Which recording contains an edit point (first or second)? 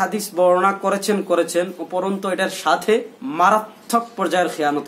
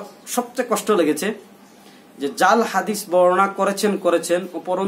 first